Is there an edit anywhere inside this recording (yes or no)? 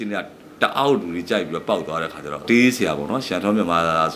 yes